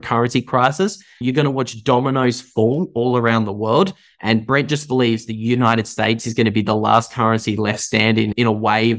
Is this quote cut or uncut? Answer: uncut